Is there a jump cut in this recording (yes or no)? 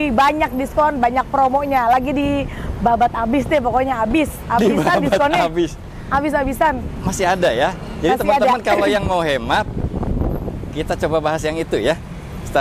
no